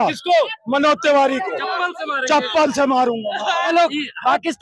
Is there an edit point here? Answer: yes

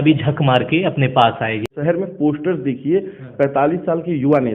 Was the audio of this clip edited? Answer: yes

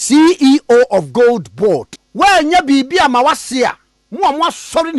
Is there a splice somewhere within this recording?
yes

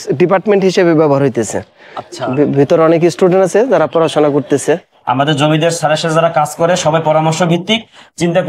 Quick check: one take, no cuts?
yes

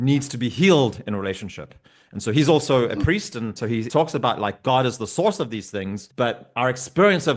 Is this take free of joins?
no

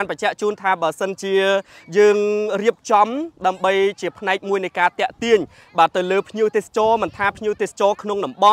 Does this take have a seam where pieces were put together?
no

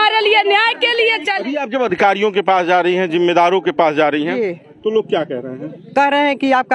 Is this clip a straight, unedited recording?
no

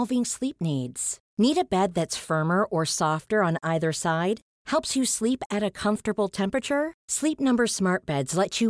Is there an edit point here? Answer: no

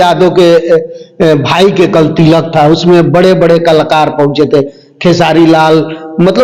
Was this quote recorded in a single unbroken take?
yes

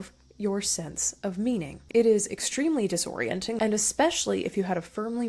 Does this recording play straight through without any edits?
no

